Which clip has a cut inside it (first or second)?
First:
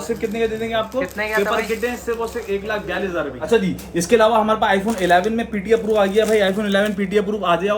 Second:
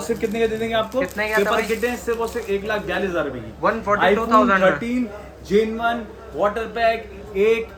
first